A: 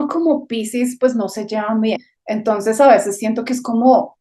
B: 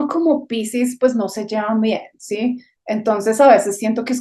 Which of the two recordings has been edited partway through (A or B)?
A